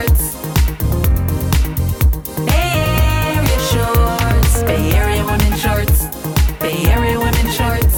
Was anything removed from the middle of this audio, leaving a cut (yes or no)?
no